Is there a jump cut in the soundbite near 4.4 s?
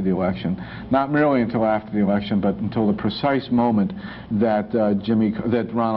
no; 0 cuts

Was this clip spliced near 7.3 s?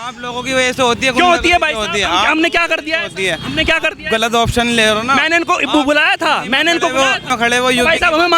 yes; 1 cut; at 7.3 s

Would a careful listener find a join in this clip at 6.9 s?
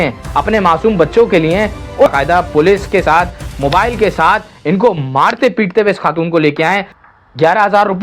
yes; 2 cuts; at 2.1 s, 6.9 s

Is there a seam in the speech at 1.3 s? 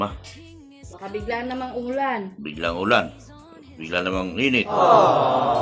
no; 1 cut; at 4.7 s

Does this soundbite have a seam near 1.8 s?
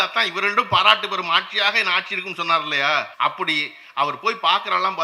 no; 1 cut; at 3.1 s

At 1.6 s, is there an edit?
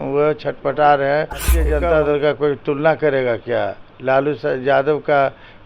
yes; 1 cut; at 1.6 s

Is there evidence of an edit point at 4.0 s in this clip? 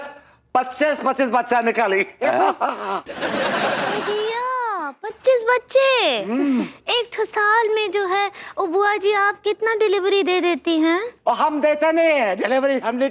yes; 1 cut; at 4.0 s

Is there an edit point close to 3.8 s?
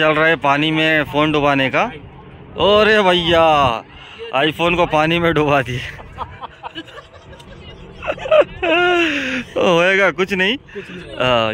no; 0 cuts

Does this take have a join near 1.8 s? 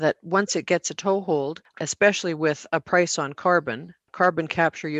yes; 2 cuts; at 1.8 s, 4.1 s

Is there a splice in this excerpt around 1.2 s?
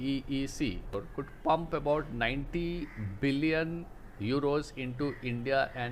yes; 1 cut; at 1.2 s

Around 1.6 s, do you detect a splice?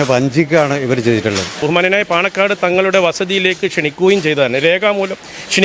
yes; 1 cut; at 1.6 s

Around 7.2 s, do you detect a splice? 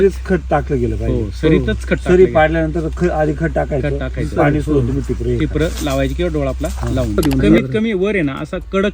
yes; 1 cut; at 7.2 s

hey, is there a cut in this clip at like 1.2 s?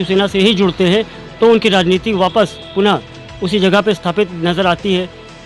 yes; 1 cut; at 1.2 s

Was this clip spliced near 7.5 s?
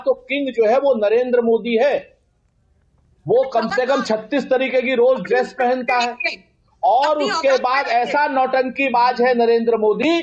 no; 1 cut; at 3.7 s

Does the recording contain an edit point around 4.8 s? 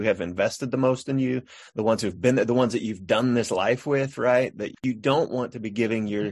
yes; 1 cut; at 4.8 s

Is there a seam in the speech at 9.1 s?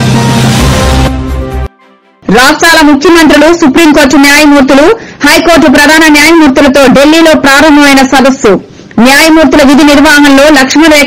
no; 1 cut; at 1.6 s

